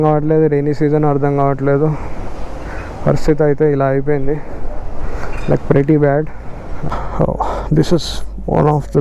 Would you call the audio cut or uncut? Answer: cut